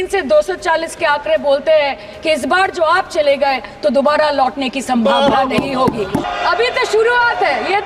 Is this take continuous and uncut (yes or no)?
no